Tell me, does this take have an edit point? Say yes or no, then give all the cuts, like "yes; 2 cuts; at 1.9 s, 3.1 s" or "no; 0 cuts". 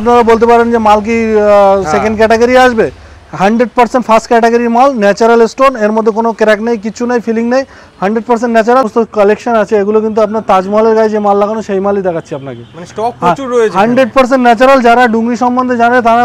yes; 1 cut; at 8.9 s